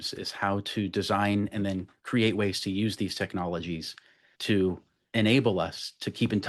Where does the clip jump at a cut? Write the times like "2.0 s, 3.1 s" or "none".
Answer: 4.9 s